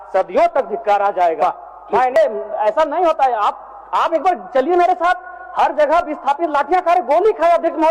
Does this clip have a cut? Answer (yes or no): yes